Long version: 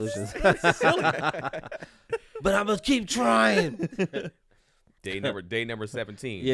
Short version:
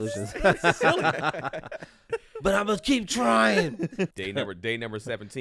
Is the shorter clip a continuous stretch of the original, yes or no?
no